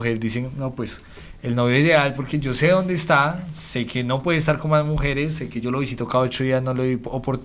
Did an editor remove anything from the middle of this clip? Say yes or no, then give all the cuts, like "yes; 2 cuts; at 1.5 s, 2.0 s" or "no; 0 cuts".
no; 0 cuts